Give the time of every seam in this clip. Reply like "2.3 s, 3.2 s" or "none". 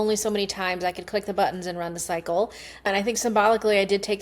2.9 s